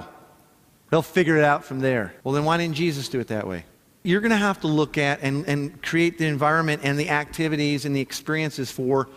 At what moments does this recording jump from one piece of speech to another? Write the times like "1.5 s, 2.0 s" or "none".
2.1 s, 4.0 s